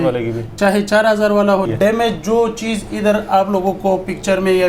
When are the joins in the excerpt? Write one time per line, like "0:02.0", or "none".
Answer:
0:01.7